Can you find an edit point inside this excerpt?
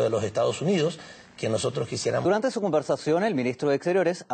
no; 0 cuts

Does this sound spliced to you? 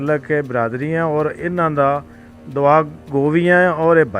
no; 0 cuts

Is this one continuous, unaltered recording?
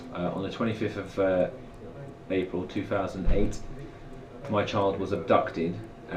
yes; 0 cuts

